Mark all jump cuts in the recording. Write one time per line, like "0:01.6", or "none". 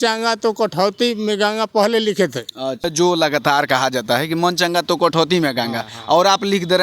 0:02.8